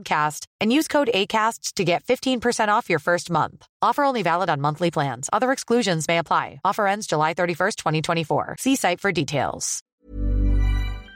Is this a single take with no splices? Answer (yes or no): no